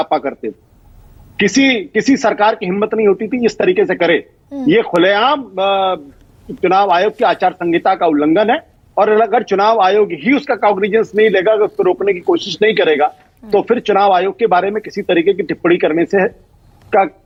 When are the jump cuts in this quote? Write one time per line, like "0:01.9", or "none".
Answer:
none